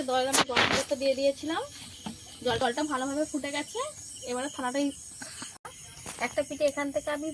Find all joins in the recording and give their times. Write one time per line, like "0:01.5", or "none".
0:05.7

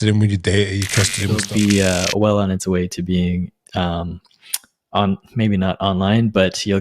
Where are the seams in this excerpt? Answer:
0:01.3

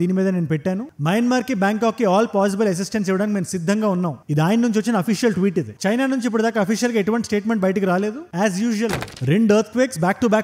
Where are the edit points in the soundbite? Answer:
0:09.1

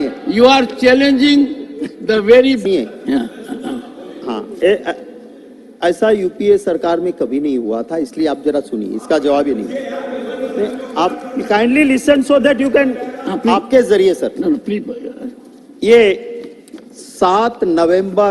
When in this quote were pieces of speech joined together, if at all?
0:02.6

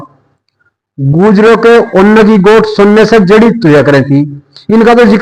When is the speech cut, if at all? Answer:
none

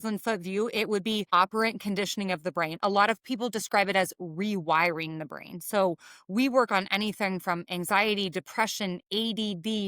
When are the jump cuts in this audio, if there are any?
0:01.2

